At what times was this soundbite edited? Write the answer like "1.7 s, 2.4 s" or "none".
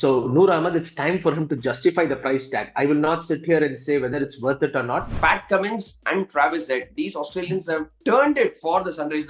5.1 s

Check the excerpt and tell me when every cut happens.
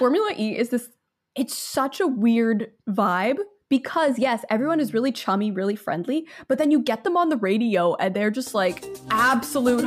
8.9 s

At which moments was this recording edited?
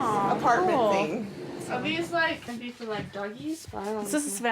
2.5 s

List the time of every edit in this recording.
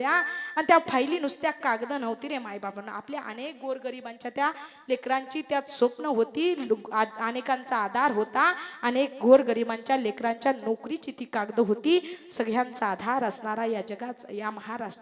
none

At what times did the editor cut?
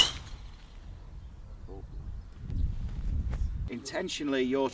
none

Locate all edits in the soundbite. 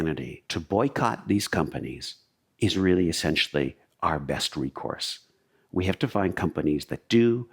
none

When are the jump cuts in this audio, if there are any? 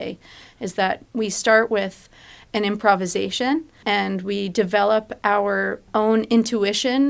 3.8 s, 5.9 s

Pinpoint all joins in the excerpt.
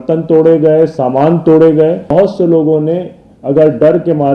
2.1 s

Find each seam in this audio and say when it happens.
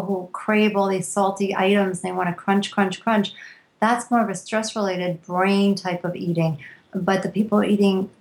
none

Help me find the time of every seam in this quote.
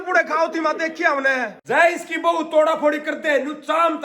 1.6 s

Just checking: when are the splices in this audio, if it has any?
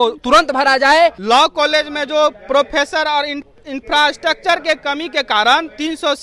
1.2 s

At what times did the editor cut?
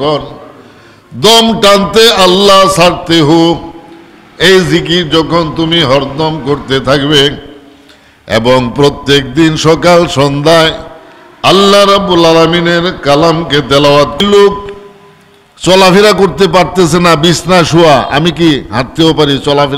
14.2 s

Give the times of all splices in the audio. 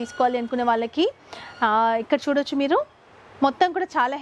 none

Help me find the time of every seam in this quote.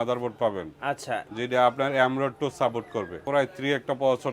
3.2 s

